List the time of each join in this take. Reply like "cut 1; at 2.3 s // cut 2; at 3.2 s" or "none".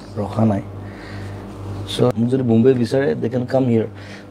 cut 1; at 2.1 s